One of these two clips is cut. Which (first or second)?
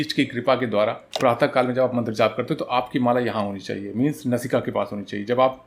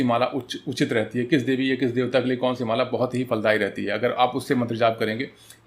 first